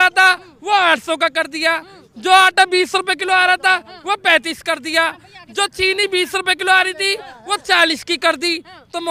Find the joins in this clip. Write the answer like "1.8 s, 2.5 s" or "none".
none